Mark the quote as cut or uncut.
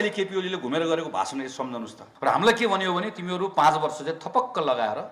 cut